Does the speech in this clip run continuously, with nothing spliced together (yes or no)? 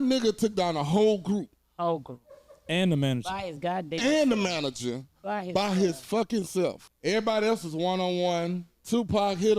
no